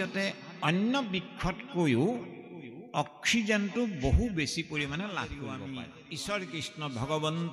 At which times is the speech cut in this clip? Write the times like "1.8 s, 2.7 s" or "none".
5.4 s